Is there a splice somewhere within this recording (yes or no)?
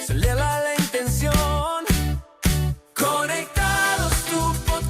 no